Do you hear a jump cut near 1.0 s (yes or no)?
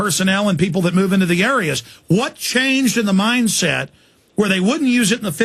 yes